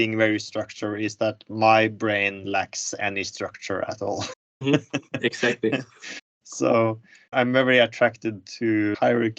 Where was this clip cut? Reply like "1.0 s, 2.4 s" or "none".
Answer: 7.2 s